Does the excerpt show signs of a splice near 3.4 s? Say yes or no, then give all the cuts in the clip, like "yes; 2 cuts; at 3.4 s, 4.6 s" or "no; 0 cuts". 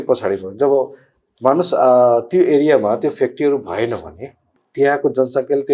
no; 0 cuts